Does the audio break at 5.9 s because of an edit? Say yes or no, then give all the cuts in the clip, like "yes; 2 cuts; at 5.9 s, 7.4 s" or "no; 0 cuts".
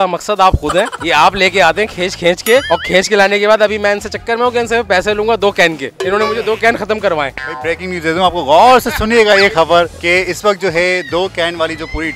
no; 0 cuts